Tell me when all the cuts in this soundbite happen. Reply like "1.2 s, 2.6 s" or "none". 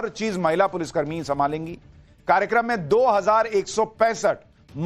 3.3 s